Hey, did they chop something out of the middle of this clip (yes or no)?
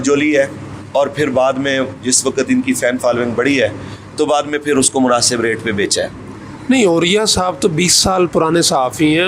no